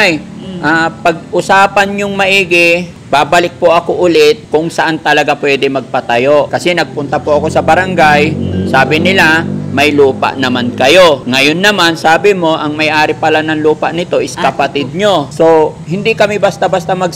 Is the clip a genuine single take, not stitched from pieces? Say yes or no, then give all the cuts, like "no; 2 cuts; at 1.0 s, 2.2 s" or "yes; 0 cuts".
no; 5 cuts; at 2.9 s, 4.4 s, 6.5 s, 11.2 s, 15.3 s